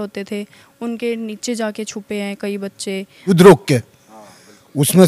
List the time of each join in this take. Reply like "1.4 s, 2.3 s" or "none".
3.3 s